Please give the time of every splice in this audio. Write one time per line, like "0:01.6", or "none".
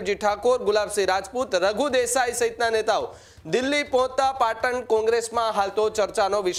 none

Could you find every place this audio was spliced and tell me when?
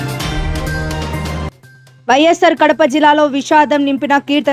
0:01.6

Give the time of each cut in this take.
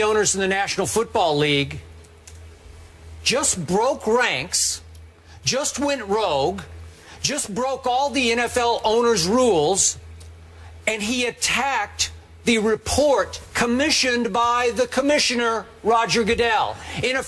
0:12.7

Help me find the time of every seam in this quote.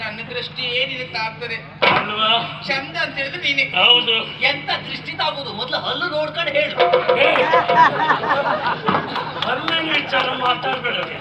none

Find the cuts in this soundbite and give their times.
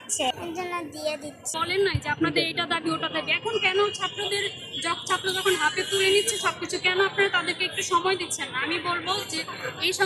0:01.5

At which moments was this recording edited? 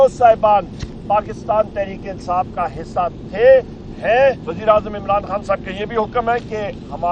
0:04.5

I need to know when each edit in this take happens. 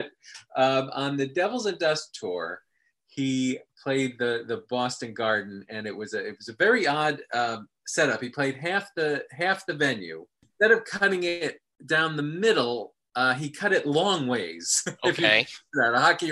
0:03.7
0:10.5

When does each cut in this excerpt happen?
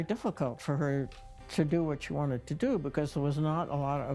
none

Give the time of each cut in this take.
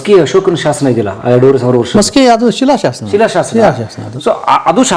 none

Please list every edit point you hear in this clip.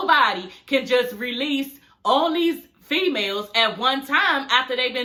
none

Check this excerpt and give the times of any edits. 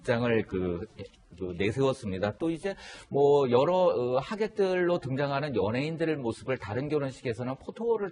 0:05.0

